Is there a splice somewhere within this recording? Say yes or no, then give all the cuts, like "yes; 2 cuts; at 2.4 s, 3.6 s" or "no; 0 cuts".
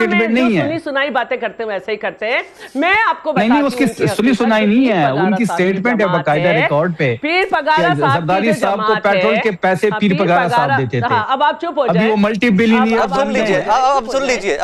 no; 0 cuts